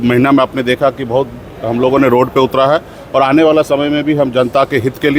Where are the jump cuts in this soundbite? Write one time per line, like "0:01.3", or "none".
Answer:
none